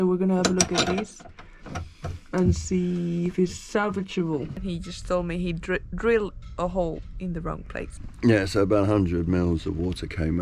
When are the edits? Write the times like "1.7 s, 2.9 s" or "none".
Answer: 4.6 s, 8.0 s